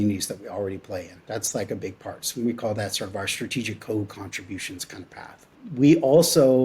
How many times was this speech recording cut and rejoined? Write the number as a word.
one